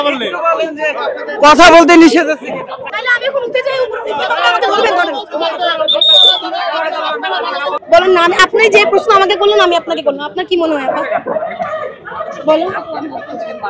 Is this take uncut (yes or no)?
no